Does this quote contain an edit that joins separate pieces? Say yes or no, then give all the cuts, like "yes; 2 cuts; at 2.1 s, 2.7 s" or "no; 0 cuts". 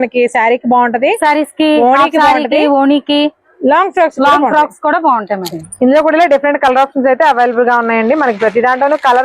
yes; 1 cut; at 5.6 s